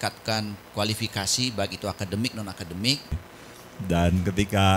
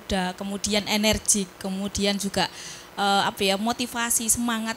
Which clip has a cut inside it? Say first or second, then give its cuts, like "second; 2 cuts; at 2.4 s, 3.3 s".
first; 1 cut; at 3.3 s